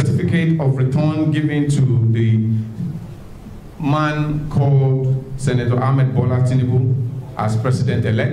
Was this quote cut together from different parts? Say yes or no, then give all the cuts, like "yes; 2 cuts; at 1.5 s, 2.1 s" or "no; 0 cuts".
no; 0 cuts